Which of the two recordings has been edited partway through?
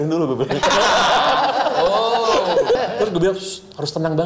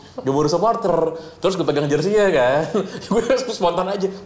first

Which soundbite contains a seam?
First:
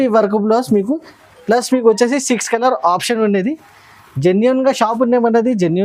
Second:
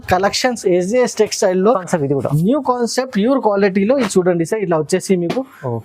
second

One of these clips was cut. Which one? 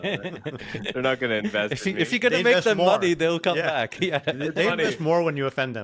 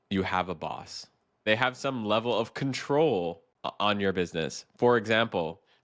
second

